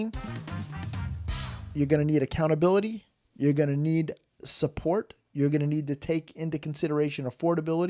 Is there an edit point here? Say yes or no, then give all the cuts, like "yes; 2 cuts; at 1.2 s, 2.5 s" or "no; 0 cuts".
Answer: no; 0 cuts